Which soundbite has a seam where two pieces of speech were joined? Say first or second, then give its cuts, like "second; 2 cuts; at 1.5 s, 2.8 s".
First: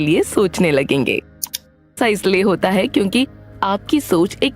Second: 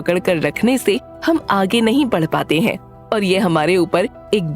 first; 1 cut; at 1.9 s